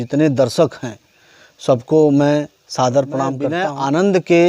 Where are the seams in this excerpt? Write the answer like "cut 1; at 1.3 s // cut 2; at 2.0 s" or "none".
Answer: cut 1; at 3.5 s